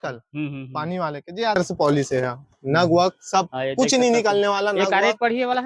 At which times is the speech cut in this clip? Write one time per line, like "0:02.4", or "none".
0:01.6